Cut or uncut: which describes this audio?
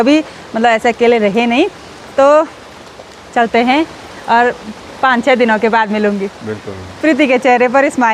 uncut